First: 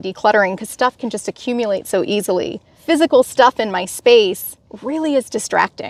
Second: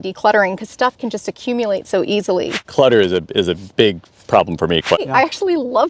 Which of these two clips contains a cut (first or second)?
second